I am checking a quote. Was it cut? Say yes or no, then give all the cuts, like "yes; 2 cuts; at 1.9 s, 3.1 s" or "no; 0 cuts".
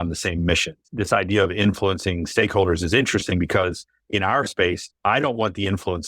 yes; 2 cuts; at 0.9 s, 4.9 s